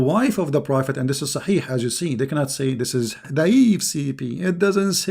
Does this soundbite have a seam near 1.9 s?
no; 1 cut; at 3.2 s

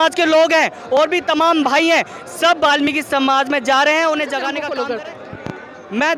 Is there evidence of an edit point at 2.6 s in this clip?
no; 1 cut; at 4.6 s

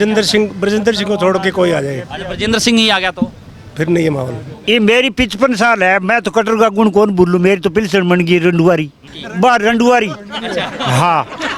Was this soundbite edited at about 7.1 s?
no; 2 cuts; at 4.5 s, 9.2 s

